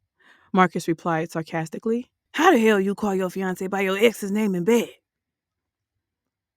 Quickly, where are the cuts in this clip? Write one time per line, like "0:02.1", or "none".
0:02.2